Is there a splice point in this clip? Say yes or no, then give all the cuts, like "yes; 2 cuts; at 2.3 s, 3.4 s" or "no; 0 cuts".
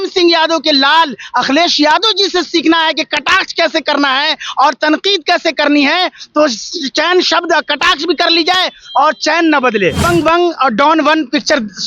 yes; 1 cut; at 10.0 s